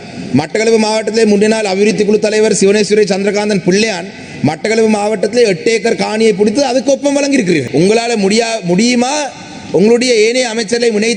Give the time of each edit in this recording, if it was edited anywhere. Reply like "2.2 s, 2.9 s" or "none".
7.7 s